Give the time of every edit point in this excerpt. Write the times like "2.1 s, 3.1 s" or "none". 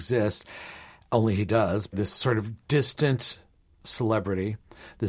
1.9 s, 3.8 s